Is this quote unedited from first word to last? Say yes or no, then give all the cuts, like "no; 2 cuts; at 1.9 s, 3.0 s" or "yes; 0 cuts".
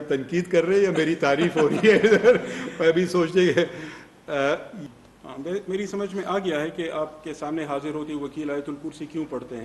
no; 1 cut; at 4.8 s